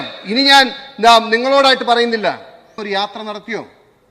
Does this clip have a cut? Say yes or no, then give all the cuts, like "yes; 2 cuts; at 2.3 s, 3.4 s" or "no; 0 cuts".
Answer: yes; 1 cut; at 2.7 s